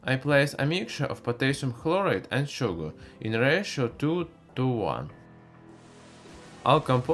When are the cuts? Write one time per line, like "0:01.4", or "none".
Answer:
none